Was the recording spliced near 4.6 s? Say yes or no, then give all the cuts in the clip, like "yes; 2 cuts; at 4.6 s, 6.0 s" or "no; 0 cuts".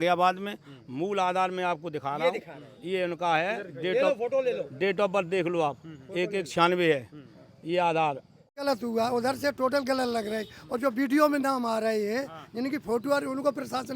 no; 1 cut; at 8.6 s